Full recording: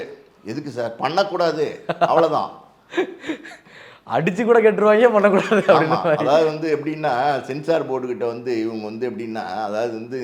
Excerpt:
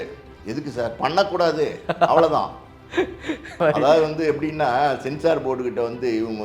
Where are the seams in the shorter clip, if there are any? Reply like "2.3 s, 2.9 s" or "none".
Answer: 3.6 s